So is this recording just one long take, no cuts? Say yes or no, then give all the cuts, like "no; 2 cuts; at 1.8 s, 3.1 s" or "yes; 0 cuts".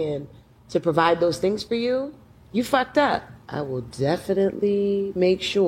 no; 1 cut; at 3.4 s